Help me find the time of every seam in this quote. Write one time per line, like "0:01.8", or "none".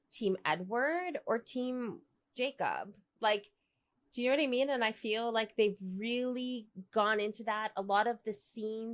none